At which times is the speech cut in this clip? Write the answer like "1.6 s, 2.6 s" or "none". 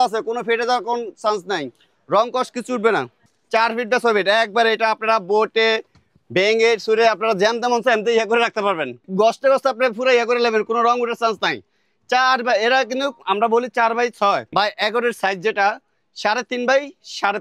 3.2 s, 9.0 s, 14.5 s